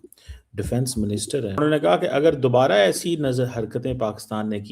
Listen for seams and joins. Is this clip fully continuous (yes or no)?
no